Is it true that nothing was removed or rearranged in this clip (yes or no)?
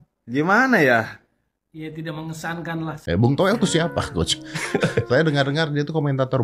no